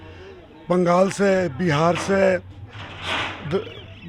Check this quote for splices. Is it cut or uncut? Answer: uncut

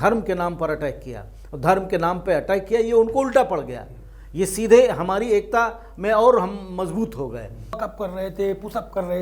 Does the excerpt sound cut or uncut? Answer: cut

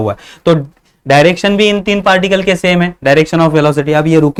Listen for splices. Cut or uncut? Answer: uncut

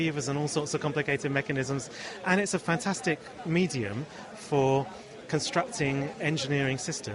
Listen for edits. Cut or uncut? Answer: uncut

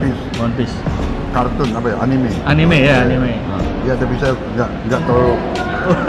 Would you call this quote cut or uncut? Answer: uncut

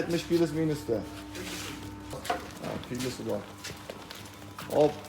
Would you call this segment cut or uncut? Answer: cut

